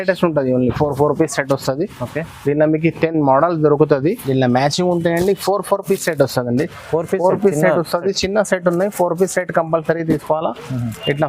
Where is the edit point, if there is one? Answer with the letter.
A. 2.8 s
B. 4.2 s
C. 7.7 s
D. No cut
B